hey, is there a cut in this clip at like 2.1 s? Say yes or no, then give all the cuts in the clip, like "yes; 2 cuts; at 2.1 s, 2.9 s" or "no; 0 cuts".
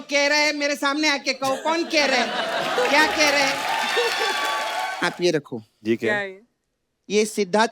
no; 1 cut; at 4.9 s